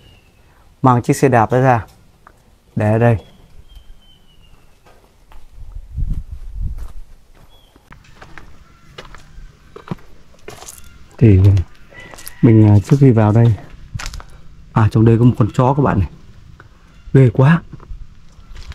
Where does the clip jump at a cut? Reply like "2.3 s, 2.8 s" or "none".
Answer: 7.9 s